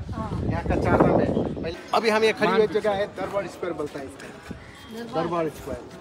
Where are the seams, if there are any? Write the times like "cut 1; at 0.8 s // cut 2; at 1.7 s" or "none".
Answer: cut 1; at 1.7 s